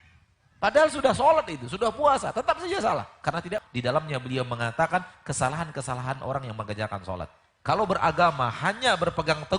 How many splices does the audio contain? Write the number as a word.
two